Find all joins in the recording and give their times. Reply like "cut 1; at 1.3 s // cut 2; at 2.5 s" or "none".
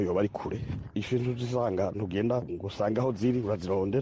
cut 1; at 0.9 s

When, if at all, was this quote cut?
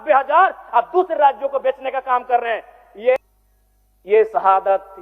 cut 1; at 3.2 s

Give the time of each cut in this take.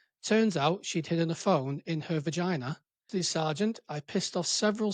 cut 1; at 3.1 s

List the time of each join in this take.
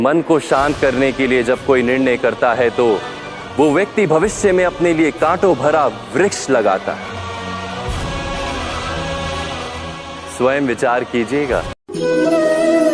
cut 1; at 11.7 s

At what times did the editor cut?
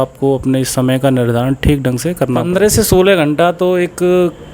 cut 1; at 2.4 s

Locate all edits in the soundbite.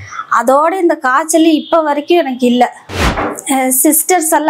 none

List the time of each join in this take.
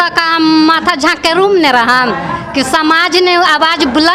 none

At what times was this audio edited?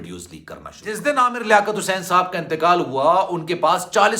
cut 1; at 1.0 s

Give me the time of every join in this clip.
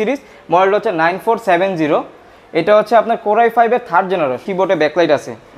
cut 1; at 4.5 s

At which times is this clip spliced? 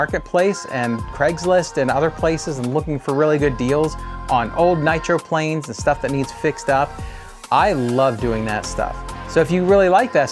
none

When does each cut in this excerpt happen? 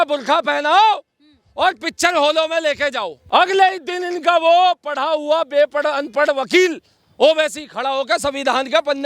cut 1; at 3.1 s

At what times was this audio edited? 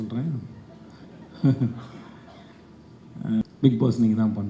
cut 1; at 3.4 s

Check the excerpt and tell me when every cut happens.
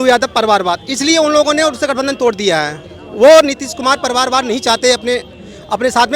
none

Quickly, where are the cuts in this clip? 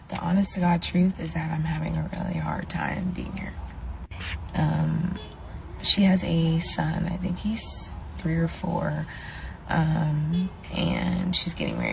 cut 1; at 3.6 s // cut 2; at 9.1 s

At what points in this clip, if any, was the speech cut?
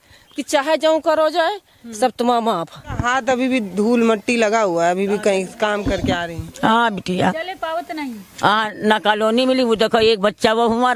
cut 1; at 3.0 s // cut 2; at 8.3 s

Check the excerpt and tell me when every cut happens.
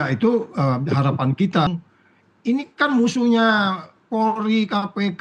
cut 1; at 1.7 s

